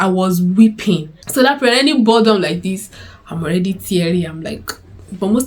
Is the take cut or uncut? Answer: cut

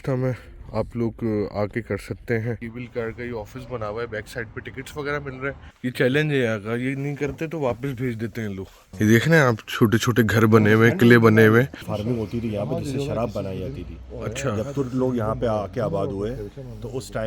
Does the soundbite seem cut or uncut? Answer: cut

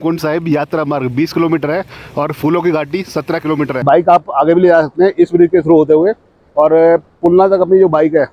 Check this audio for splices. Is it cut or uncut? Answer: cut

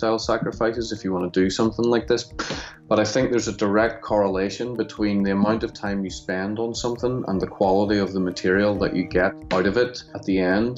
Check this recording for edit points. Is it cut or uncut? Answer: cut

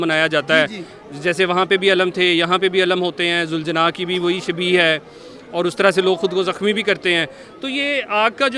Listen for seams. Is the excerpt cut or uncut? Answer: uncut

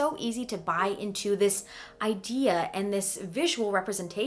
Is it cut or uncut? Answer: uncut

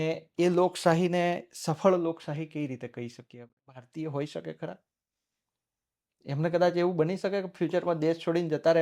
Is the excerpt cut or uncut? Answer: cut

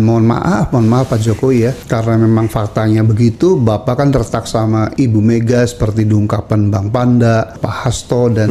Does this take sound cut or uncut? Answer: cut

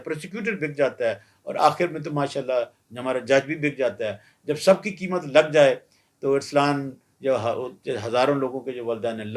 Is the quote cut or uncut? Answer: uncut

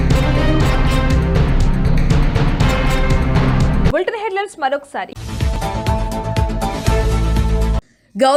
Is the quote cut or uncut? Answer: uncut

